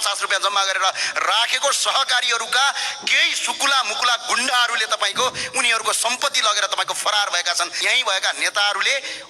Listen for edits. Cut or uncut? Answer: cut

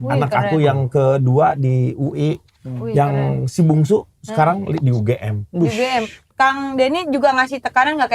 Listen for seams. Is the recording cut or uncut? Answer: cut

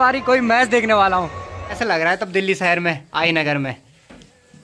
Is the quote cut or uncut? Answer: cut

